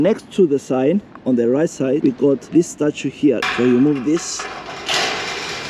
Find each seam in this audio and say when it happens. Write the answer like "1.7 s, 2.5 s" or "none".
3.4 s